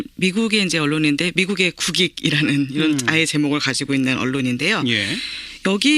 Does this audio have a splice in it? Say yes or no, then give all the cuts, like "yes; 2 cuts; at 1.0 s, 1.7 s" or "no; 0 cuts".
yes; 1 cut; at 4.0 s